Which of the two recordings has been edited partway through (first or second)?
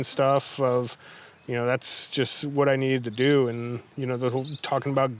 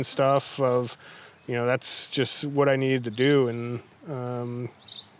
first